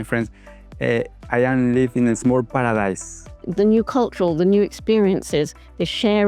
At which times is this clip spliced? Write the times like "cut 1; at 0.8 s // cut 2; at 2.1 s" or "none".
cut 1; at 3.4 s